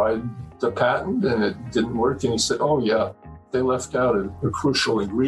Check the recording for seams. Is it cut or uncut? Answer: cut